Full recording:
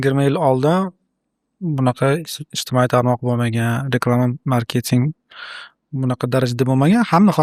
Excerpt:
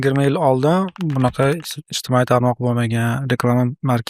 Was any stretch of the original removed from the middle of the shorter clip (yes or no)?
yes